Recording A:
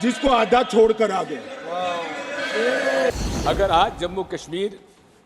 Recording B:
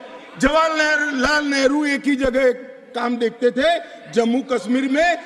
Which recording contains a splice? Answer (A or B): A